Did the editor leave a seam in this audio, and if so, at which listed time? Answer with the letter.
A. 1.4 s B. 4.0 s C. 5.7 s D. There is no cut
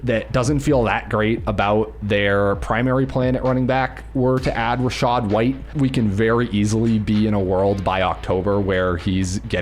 C